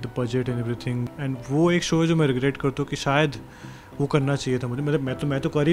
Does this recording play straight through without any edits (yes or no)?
no